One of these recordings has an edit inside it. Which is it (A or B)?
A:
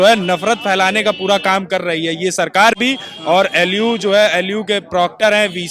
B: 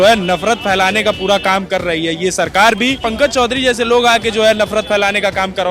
B